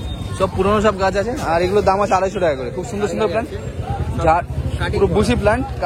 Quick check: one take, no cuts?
yes; 0 cuts

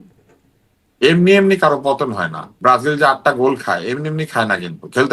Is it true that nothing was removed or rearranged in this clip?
yes; 0 cuts

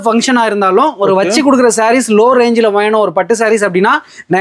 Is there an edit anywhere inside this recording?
no; 0 cuts

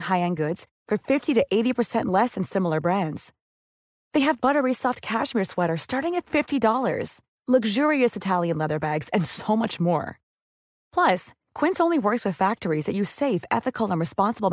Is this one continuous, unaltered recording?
yes; 0 cuts

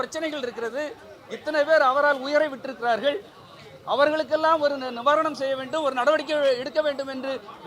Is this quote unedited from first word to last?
yes; 0 cuts

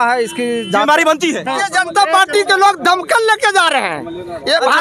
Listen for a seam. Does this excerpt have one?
yes; 1 cut; at 1.4 s

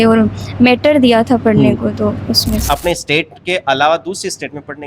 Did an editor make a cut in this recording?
yes; 1 cut; at 2.6 s

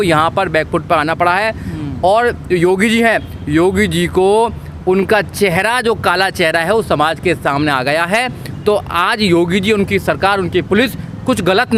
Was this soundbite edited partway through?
no; 0 cuts

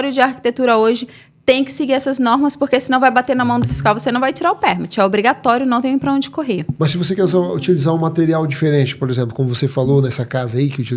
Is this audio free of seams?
yes; 0 cuts

